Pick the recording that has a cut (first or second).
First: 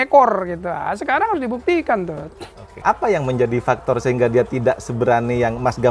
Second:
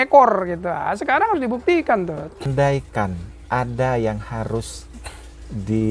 second